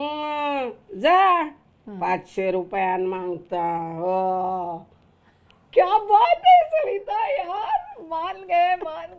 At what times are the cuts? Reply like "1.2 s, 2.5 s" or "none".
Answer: none

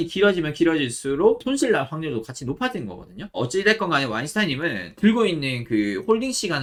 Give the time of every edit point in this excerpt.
none

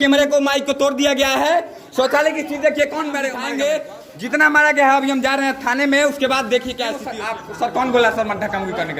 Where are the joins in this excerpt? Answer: 3.4 s, 7.0 s

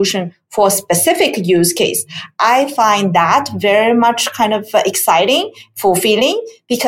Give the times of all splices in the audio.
none

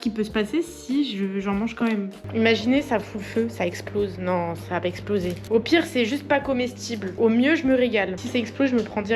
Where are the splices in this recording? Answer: 2.2 s, 5.4 s, 8.2 s

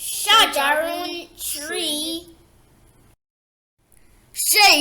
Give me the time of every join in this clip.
2.1 s

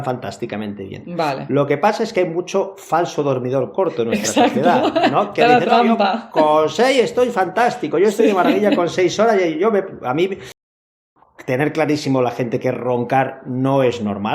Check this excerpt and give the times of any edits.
10.6 s

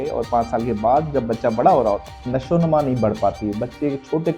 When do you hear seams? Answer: 2.1 s

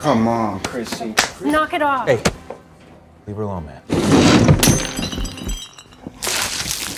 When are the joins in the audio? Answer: none

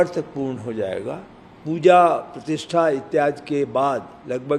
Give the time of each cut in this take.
1.6 s

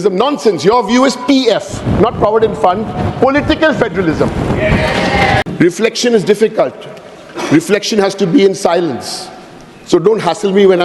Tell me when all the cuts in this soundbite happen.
5.4 s

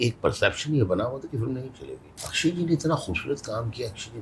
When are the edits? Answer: 2.1 s

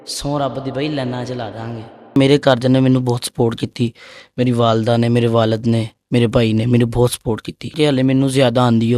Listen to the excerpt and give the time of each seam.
2.2 s, 7.7 s

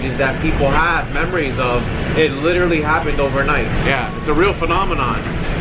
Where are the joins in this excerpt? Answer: none

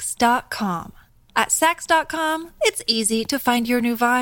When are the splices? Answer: none

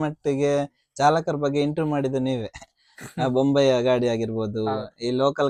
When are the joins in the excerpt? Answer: none

